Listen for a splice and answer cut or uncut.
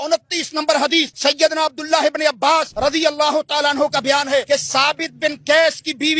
cut